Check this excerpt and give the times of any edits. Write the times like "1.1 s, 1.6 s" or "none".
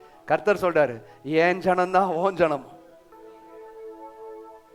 none